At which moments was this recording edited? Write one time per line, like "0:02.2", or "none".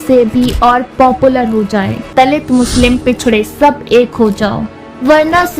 0:02.1